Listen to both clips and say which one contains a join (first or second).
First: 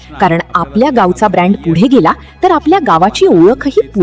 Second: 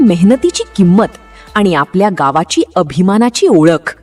first